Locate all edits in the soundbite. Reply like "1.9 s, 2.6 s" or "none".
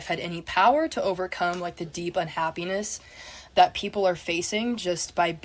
3.4 s